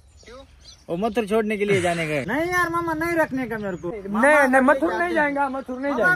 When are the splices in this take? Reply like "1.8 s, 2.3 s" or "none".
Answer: 2.3 s, 3.9 s